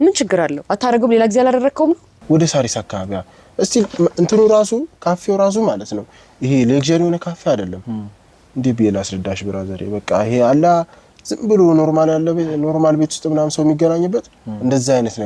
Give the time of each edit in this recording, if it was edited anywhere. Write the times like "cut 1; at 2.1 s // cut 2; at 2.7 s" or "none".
cut 1; at 2.1 s